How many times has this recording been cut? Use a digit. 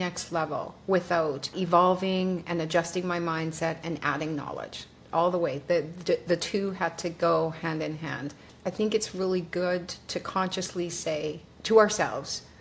3